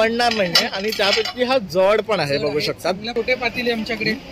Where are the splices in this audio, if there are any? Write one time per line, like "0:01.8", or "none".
0:03.1